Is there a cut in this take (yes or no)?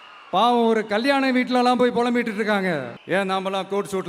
yes